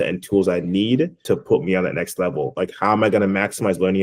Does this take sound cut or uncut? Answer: cut